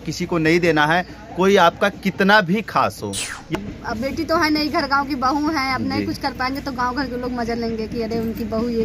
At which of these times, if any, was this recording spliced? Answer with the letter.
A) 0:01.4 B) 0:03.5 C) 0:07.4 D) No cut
B